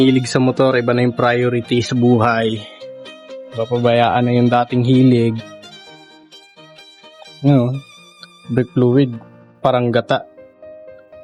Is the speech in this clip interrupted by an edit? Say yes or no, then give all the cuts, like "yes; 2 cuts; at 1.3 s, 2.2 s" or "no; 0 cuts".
no; 0 cuts